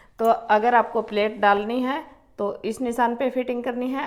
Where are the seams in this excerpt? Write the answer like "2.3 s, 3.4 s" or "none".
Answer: none